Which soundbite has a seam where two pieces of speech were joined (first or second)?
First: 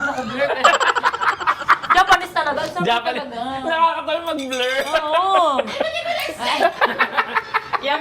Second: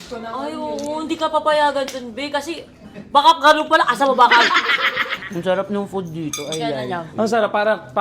second